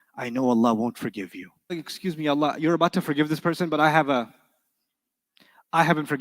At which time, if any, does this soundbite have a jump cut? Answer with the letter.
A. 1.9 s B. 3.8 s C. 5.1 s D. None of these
A